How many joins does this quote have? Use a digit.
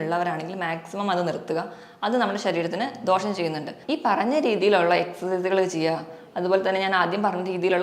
1